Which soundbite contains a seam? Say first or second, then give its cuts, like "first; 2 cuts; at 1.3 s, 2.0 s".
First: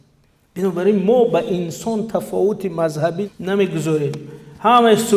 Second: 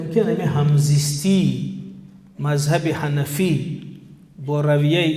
first; 1 cut; at 3.3 s